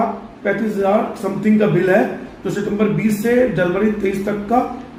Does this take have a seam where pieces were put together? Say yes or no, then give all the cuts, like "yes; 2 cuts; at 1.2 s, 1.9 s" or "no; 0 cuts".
no; 0 cuts